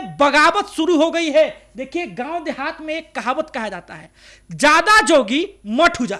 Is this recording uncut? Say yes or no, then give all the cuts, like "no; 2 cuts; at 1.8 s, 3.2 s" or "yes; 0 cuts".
yes; 0 cuts